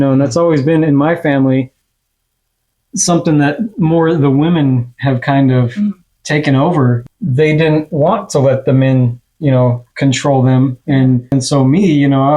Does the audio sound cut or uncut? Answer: cut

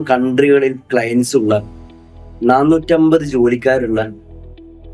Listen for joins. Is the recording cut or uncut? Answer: uncut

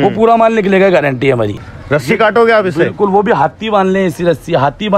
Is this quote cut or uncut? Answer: cut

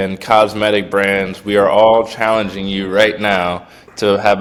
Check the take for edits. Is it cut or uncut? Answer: uncut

